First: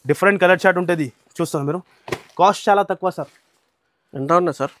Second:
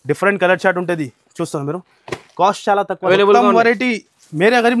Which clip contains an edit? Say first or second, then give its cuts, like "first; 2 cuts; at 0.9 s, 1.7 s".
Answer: second; 1 cut; at 3.0 s